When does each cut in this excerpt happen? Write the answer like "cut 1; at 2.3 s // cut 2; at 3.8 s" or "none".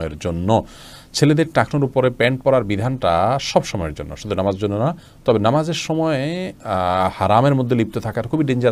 none